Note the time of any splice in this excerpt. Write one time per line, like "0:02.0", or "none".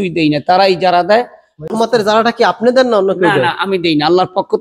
0:01.6